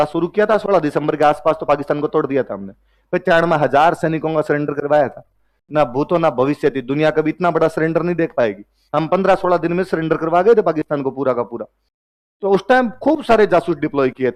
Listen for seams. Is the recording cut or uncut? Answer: uncut